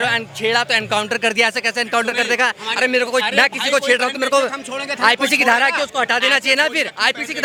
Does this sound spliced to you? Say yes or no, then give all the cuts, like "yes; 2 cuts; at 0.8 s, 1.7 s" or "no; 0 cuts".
no; 0 cuts